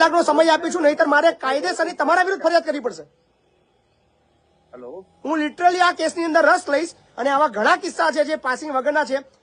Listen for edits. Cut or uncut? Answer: uncut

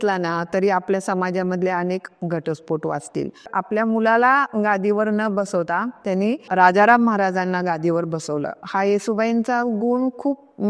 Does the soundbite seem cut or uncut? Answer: cut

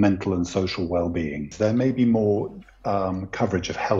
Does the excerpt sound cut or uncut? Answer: cut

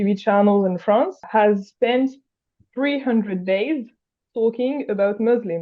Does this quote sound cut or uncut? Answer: cut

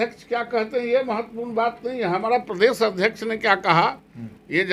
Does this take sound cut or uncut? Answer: uncut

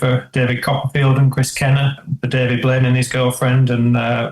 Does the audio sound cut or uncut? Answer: cut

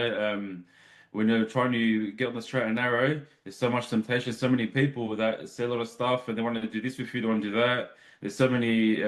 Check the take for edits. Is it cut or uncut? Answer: uncut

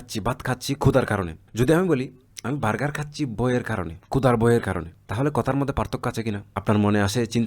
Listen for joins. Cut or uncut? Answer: cut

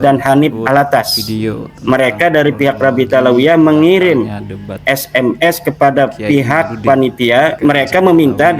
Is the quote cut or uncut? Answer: cut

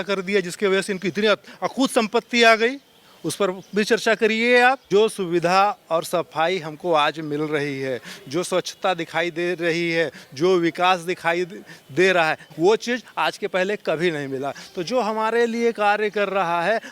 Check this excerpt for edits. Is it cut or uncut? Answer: cut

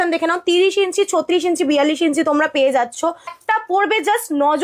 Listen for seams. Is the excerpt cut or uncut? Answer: cut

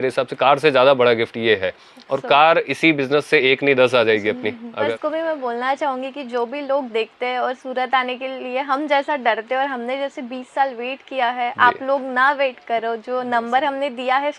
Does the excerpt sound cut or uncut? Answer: cut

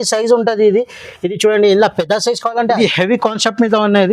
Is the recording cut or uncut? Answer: cut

